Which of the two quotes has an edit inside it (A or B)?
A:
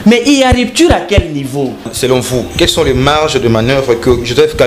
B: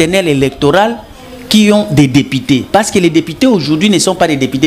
A